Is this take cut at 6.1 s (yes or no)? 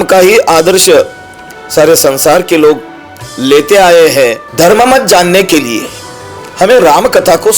no